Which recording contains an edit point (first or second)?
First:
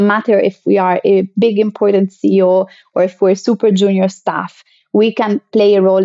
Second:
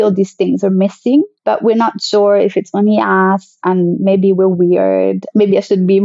second